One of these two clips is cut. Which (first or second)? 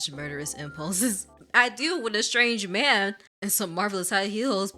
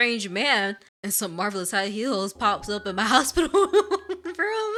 first